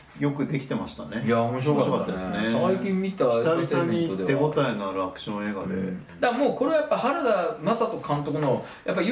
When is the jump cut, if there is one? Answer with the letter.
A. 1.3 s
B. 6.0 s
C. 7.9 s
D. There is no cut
B